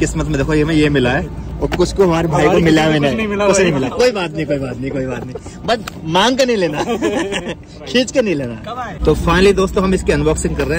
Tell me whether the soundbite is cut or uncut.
uncut